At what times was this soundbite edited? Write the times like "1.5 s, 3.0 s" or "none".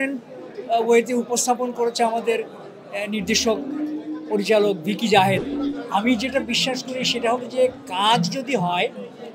5.4 s